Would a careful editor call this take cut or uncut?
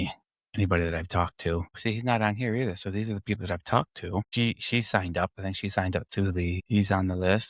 uncut